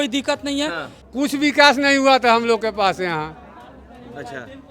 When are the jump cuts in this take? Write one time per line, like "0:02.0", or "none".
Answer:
0:00.9